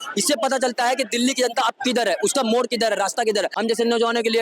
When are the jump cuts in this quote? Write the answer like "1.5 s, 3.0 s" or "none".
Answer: 3.5 s